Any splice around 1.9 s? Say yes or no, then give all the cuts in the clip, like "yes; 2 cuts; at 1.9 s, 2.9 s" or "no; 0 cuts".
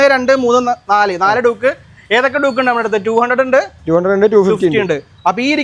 no; 0 cuts